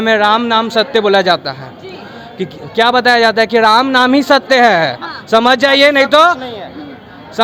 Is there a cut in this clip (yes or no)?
no